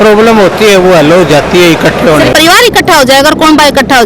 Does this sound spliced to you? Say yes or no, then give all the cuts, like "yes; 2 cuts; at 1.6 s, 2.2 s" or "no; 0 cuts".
yes; 1 cut; at 2.3 s